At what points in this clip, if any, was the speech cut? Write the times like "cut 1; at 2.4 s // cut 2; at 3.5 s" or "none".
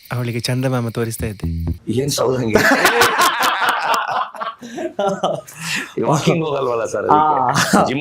none